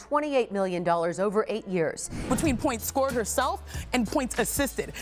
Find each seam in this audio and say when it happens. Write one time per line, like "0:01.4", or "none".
0:02.2

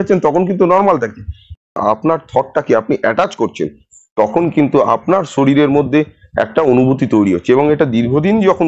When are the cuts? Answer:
0:01.6

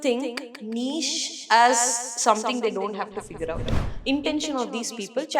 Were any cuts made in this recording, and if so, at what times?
0:03.8

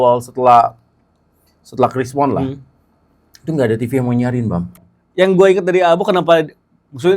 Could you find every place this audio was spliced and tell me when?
0:04.7

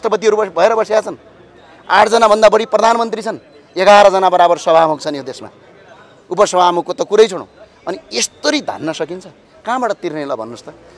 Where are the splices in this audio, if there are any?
none

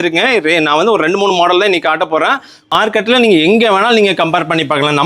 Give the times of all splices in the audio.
0:02.7

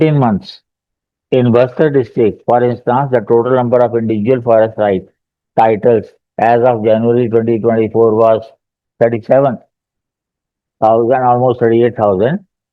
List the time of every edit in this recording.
none

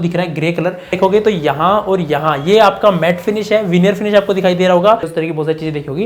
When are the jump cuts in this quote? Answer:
0:01.0
0:05.1

